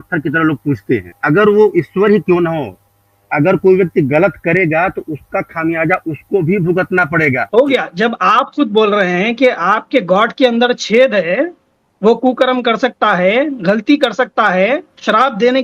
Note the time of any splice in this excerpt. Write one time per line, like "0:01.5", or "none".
0:01.1
0:07.4